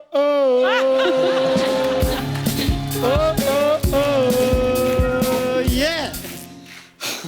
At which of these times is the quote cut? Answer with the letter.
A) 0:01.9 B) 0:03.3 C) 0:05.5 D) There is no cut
D